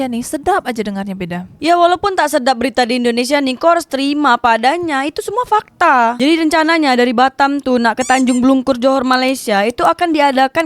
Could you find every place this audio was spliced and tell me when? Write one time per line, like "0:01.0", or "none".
0:01.5
0:06.2